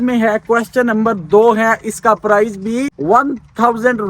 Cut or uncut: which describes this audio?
cut